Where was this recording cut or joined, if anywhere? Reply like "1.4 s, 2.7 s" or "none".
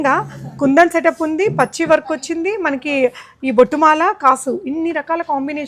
none